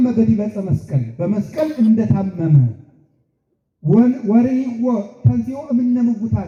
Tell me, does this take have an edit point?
no; 0 cuts

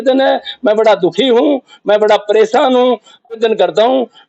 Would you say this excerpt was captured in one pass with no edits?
no; 1 cut; at 3.4 s

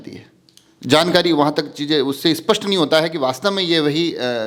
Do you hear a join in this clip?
no; 0 cuts

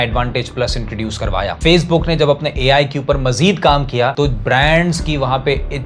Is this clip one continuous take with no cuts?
yes; 0 cuts

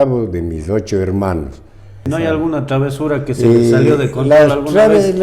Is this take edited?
yes; 1 cut; at 2.0 s

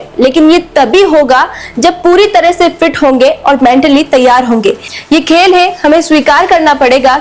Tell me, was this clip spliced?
yes; 1 cut; at 4.9 s

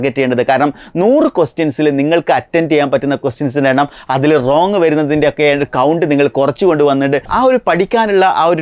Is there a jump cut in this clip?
yes; 1 cut; at 7.3 s

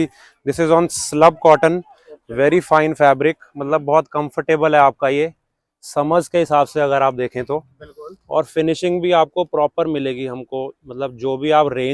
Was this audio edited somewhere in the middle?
no; 0 cuts

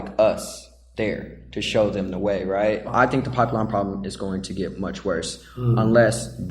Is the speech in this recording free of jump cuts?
no; 1 cut; at 2.9 s

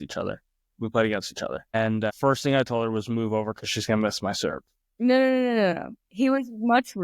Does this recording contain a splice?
no; 0 cuts

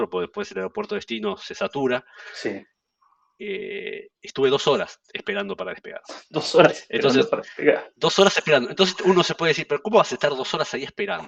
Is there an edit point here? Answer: no; 0 cuts

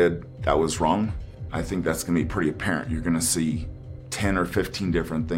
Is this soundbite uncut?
no; 1 cut; at 1.2 s

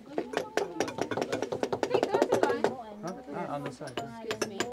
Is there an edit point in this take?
no; 0 cuts

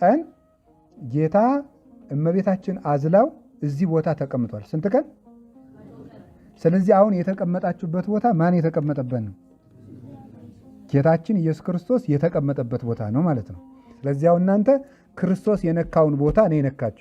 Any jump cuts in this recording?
yes; 1 cut; at 13.9 s

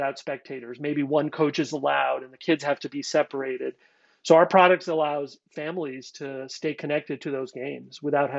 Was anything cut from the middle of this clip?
no; 0 cuts

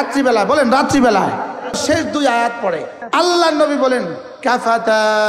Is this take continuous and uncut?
no; 2 cuts; at 1.8 s, 3.0 s

